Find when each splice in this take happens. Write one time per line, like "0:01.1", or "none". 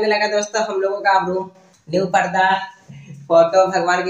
none